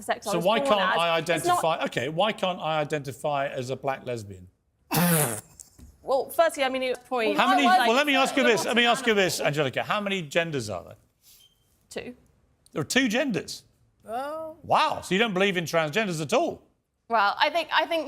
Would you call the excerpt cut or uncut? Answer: cut